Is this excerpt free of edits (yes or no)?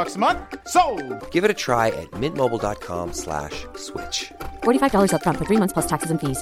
yes